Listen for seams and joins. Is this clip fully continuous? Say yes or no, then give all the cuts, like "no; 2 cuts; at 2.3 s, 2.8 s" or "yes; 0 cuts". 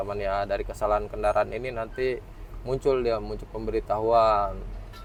yes; 0 cuts